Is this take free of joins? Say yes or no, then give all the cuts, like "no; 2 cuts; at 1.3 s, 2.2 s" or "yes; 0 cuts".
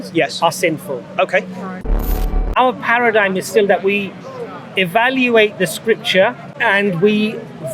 no; 2 cuts; at 2.1 s, 6.5 s